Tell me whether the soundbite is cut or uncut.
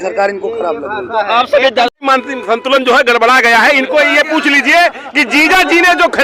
cut